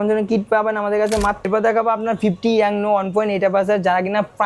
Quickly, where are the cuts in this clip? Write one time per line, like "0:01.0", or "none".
0:01.5